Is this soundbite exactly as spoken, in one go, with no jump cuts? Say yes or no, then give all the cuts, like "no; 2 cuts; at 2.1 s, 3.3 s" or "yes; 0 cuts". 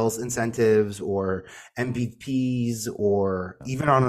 yes; 0 cuts